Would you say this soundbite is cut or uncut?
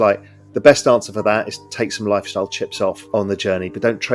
cut